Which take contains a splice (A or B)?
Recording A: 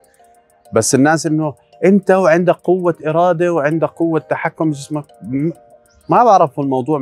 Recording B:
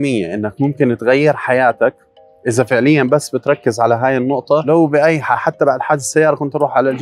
B